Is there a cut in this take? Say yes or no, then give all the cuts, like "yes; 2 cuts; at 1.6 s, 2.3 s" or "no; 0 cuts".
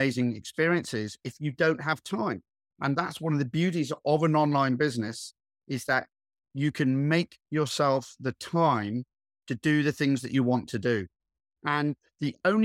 no; 0 cuts